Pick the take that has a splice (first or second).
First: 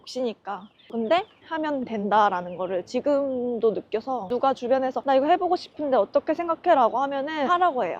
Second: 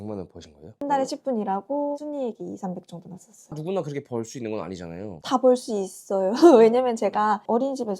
second